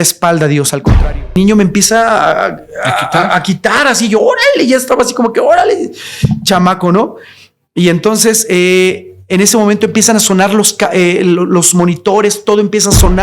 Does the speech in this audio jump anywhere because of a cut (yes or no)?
yes